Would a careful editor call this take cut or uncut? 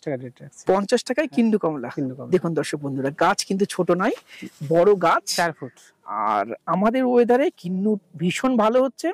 uncut